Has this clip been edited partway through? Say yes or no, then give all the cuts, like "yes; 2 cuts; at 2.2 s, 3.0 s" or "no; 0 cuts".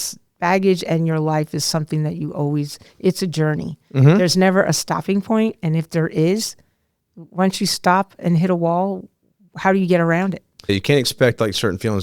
yes; 1 cut; at 10.7 s